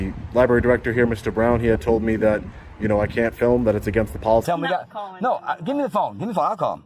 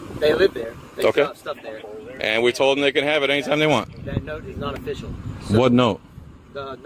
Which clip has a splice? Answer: first; 1 cut; at 4.5 s

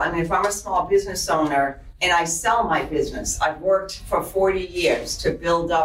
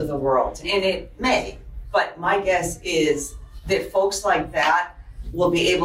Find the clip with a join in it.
first; 1 cut; at 1.9 s

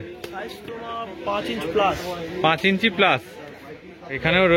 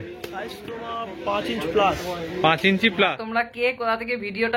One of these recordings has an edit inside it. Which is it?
second; 1 cut; at 3.2 s

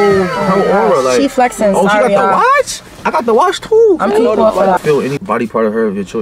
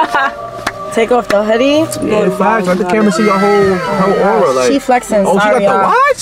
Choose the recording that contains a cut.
first; 1 cut; at 5.0 s

